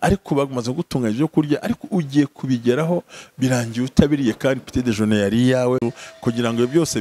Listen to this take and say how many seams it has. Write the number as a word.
one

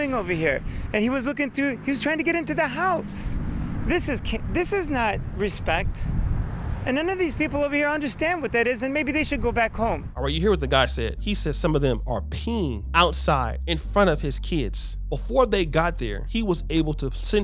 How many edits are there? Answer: zero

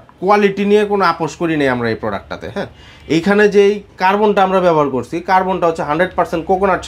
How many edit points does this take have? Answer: zero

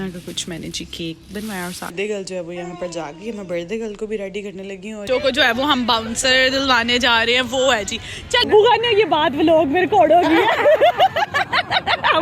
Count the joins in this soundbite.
three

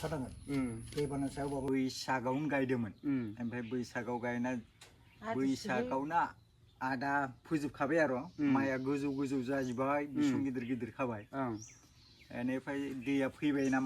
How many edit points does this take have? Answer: one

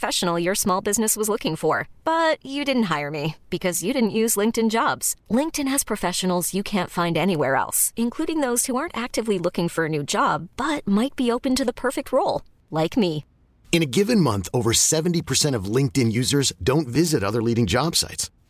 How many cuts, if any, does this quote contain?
zero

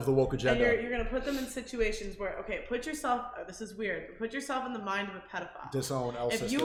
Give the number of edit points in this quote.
zero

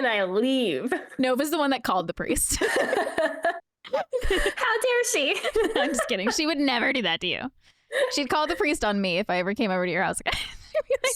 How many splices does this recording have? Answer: one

